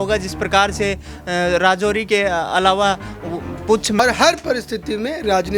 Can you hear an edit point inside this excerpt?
yes; 1 cut; at 4.0 s

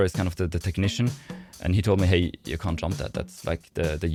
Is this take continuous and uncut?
yes; 0 cuts

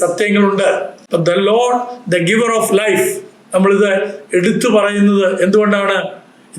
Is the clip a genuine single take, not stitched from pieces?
no; 1 cut; at 1.0 s

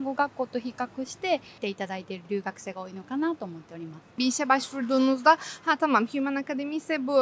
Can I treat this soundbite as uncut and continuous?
no; 1 cut; at 4.1 s

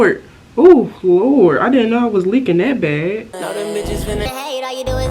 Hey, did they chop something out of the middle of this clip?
yes; 1 cut; at 3.3 s

